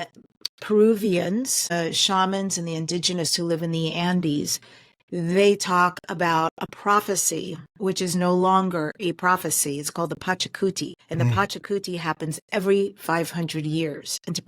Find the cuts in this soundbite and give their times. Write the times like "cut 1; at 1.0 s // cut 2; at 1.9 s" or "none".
cut 1; at 1.7 s // cut 2; at 10.9 s